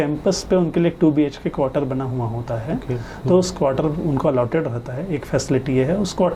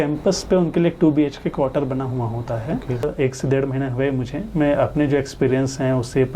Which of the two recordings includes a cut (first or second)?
second